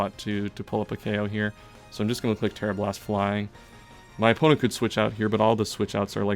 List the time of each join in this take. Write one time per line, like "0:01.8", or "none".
none